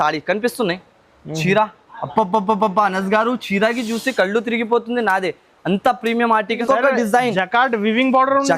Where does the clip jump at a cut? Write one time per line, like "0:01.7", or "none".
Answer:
0:06.6